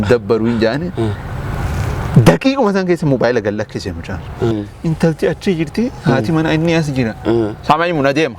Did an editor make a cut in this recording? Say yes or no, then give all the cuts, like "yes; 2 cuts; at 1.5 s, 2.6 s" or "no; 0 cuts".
yes; 1 cut; at 4.5 s